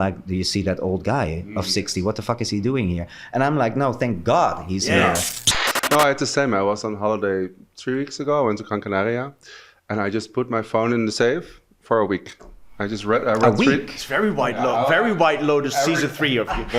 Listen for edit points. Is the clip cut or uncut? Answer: cut